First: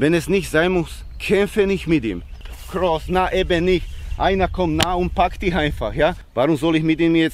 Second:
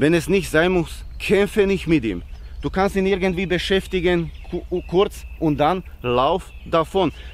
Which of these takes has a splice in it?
first; 2 cuts; at 2.6 s, 6.2 s

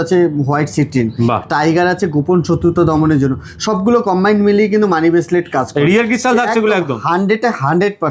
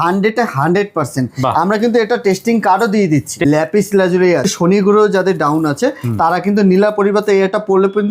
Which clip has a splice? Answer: second; 2 cuts; at 3.4 s, 4.5 s

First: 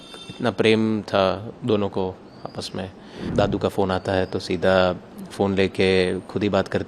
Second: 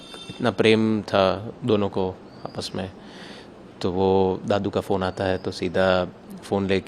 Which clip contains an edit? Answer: first; 1 cut; at 3.3 s

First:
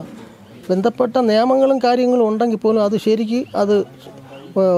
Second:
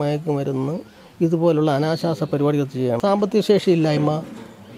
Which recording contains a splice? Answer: second; 1 cut; at 3.0 s

